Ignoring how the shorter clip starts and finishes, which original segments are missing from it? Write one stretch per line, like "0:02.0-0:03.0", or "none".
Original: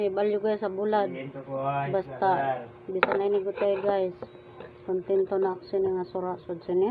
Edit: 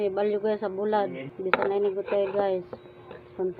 0:01.3-0:02.8